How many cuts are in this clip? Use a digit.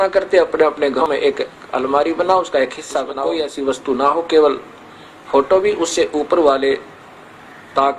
2